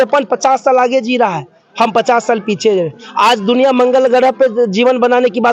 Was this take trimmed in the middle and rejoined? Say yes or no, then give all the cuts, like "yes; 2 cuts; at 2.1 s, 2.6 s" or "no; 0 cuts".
no; 0 cuts